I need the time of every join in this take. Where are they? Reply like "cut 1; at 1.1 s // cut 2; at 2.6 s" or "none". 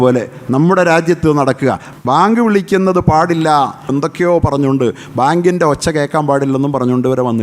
cut 1; at 1.9 s // cut 2; at 3.9 s